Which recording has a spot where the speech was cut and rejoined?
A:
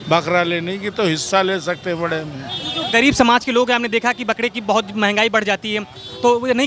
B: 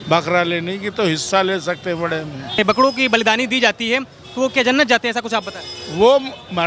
B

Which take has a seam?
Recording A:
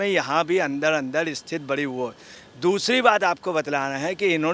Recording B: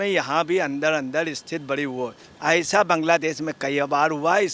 B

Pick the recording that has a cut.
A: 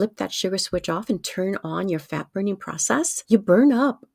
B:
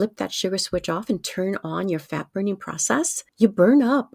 A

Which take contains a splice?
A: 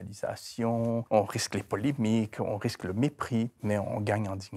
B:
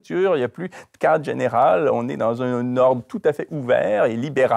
A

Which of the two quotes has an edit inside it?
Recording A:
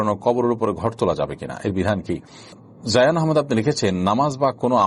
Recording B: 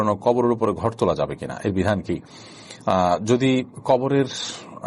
A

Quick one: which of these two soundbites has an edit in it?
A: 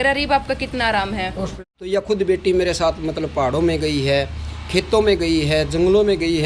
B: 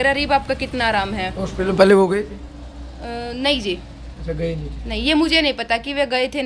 A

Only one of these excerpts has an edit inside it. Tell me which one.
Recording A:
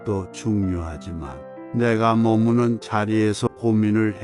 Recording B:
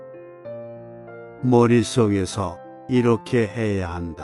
B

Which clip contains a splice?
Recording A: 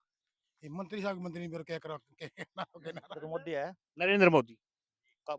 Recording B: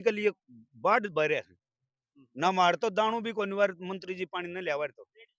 A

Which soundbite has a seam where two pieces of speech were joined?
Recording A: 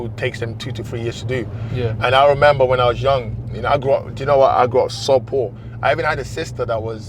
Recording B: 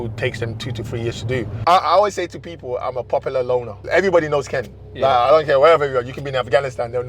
B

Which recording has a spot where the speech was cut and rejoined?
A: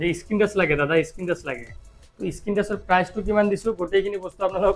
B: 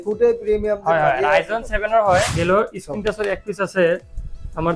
B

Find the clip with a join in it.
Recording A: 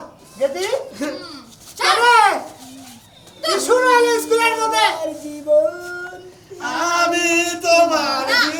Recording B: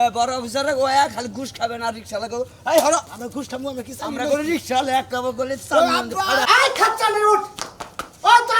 B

